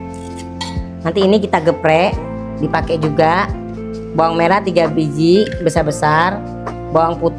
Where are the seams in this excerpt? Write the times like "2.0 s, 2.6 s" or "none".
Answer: 1.0 s

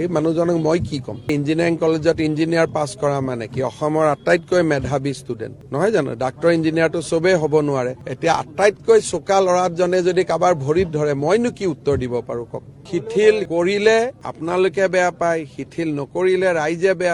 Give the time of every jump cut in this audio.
1.2 s, 12.8 s

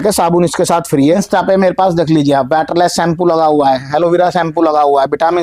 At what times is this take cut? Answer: 1.2 s

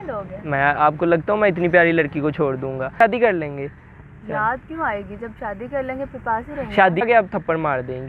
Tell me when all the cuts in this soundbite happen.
3.0 s, 7.0 s

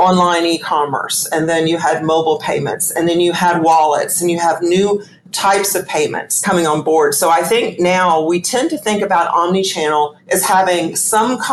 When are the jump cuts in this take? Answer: none

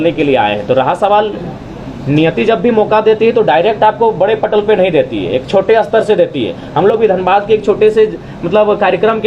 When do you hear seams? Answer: none

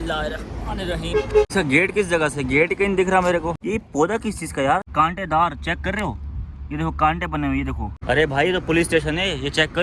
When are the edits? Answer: 1.5 s, 3.6 s, 4.9 s, 8.0 s

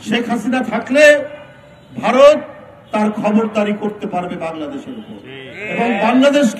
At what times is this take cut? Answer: none

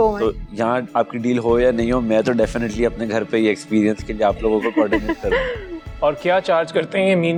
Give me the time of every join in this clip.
none

